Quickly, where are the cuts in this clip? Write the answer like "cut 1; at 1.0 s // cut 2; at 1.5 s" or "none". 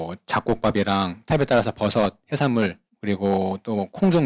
cut 1; at 2.9 s

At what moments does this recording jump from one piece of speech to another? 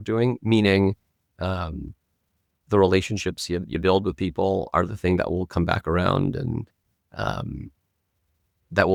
none

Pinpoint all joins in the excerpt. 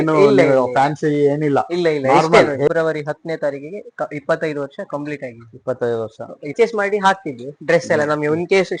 cut 1; at 2.7 s // cut 2; at 6.5 s

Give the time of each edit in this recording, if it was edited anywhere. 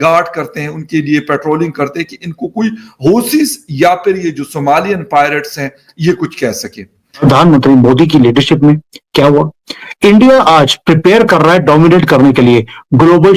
cut 1; at 7.2 s

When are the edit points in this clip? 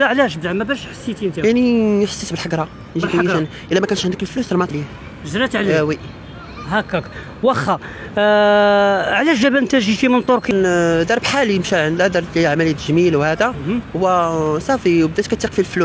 cut 1; at 4.7 s // cut 2; at 10.5 s

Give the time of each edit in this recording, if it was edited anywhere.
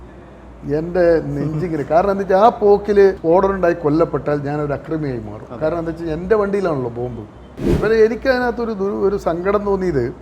cut 1; at 3.2 s // cut 2; at 7.8 s

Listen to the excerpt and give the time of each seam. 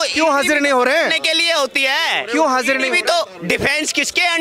none

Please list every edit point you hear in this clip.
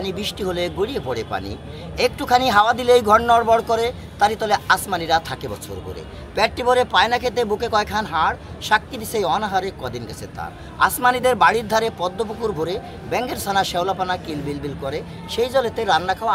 none

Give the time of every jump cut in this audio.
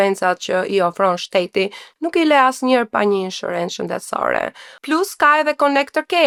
none

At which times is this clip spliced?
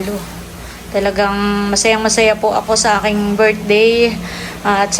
none

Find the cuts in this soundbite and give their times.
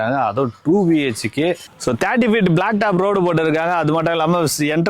cut 1; at 1.7 s

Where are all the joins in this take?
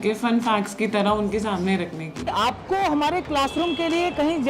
cut 1; at 2.3 s

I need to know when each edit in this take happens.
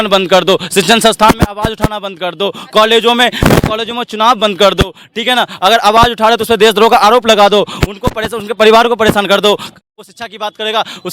cut 1; at 9.8 s

